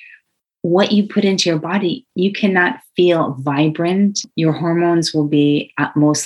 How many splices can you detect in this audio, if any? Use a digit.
2